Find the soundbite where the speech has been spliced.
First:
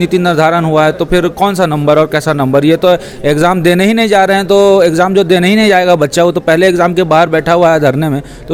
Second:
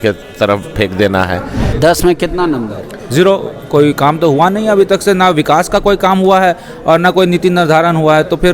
second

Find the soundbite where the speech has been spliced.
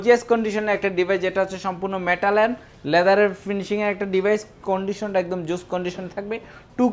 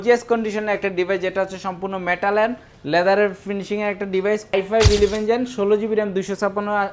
second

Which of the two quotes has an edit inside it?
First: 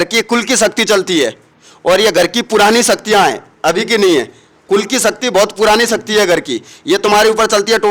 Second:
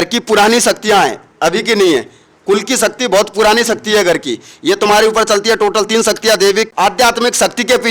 second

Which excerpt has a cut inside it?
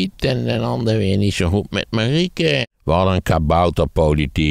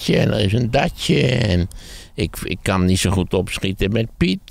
first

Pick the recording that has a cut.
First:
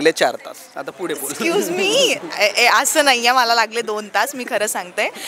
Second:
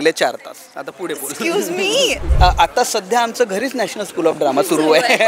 second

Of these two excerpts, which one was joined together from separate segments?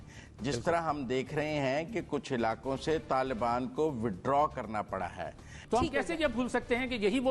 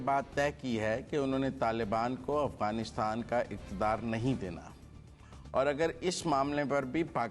first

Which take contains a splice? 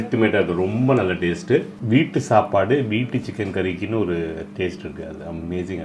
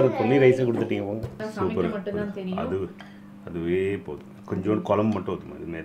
first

